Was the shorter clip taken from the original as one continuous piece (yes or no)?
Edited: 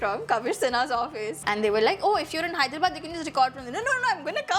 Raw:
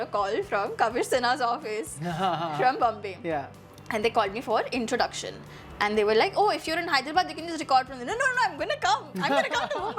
no